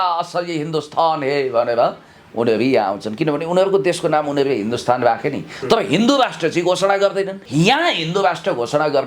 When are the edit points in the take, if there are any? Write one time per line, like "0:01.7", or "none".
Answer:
0:07.4